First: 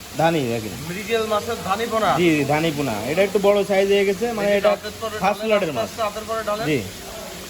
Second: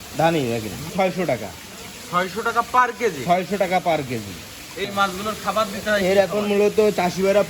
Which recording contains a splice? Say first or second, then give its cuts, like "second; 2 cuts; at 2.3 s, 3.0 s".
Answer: second; 2 cuts; at 0.9 s, 4.8 s